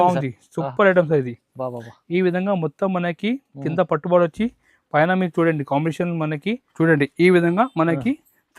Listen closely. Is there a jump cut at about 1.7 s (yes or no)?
no